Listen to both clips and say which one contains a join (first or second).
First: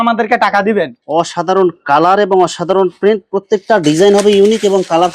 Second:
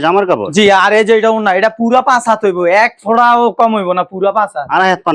first